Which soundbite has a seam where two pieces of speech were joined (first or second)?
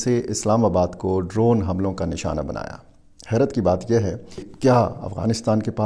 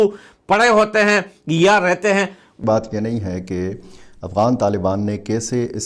second